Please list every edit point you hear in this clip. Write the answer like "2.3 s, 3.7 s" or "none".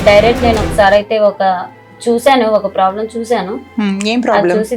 none